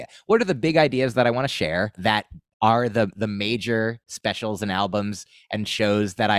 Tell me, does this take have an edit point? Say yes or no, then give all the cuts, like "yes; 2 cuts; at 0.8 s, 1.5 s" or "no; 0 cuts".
yes; 1 cut; at 2.0 s